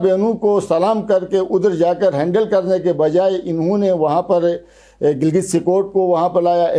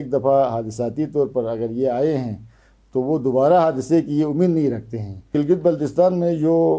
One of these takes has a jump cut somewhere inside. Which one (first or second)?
second